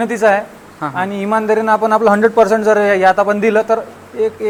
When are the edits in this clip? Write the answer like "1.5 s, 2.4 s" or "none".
none

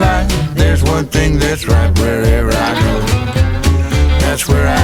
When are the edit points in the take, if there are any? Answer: none

